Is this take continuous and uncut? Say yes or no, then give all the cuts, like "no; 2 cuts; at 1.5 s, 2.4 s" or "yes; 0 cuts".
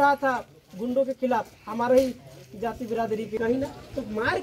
no; 1 cut; at 3.4 s